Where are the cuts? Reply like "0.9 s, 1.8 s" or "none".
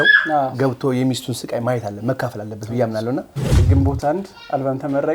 3.6 s